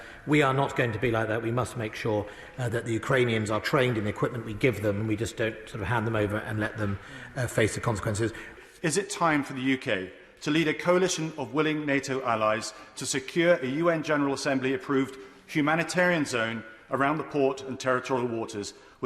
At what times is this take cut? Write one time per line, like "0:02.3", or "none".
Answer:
0:08.5